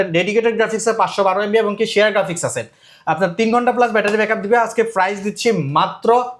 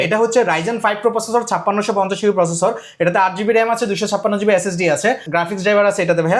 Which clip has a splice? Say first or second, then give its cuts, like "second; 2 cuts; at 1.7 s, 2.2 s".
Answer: second; 1 cut; at 5.3 s